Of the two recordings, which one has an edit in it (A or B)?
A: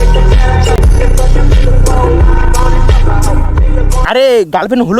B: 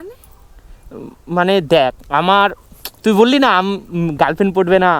A